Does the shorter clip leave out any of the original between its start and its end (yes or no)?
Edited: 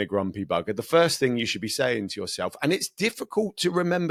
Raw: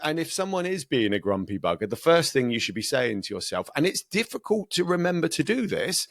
no